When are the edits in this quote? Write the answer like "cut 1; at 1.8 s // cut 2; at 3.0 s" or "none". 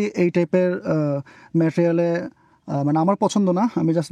none